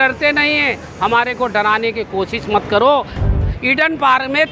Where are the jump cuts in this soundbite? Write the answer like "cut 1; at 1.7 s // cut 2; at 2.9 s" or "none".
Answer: cut 1; at 3.2 s